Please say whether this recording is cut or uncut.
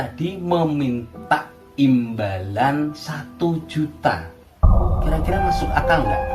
uncut